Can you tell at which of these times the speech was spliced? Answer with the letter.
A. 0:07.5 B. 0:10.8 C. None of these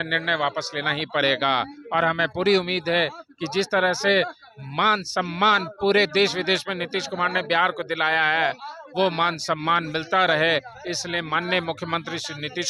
C